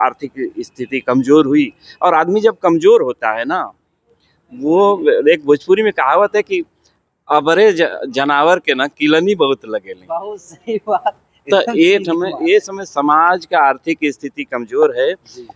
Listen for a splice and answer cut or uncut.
uncut